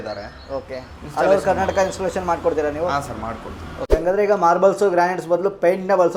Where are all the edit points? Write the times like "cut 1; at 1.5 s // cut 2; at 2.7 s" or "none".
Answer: cut 1; at 3.9 s